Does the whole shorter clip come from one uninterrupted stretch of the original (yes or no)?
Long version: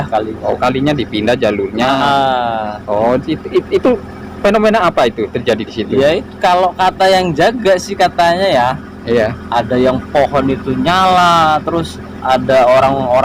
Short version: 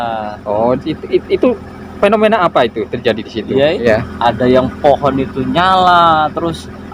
no